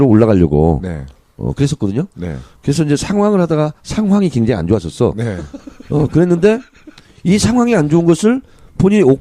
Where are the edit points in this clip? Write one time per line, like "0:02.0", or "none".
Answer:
0:03.3